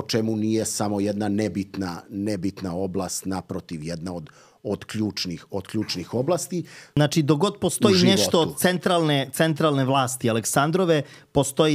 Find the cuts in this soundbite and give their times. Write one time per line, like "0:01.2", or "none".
0:07.0